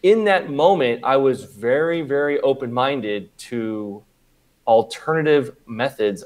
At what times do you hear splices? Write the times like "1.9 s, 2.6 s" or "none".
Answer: none